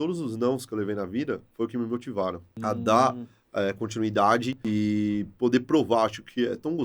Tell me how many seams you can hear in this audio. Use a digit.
2